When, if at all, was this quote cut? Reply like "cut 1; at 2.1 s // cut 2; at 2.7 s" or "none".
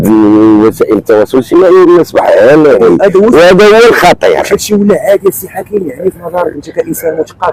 none